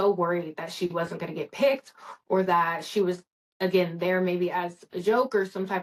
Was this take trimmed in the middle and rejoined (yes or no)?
no